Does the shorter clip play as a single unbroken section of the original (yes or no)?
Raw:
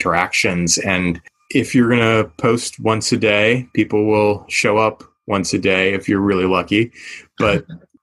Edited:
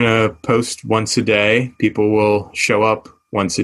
yes